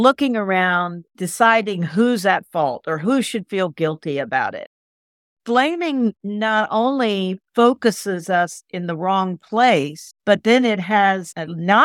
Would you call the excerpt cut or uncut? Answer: cut